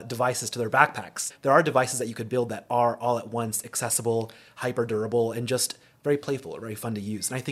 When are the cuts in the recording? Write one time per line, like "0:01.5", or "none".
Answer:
0:01.3